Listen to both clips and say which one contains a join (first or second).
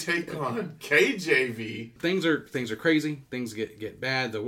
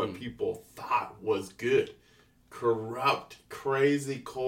first